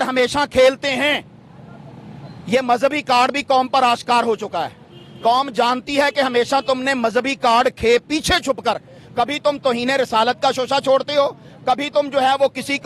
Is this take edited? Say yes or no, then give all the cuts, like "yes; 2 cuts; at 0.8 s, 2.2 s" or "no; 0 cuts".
no; 0 cuts